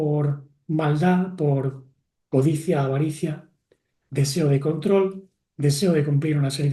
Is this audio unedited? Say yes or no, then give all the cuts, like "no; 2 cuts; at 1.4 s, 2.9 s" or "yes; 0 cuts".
yes; 0 cuts